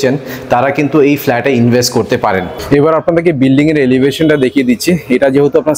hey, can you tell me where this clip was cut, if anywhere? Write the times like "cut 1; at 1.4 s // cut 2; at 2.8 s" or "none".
cut 1; at 2.6 s